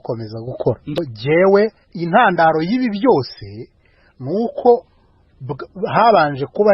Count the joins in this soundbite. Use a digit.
1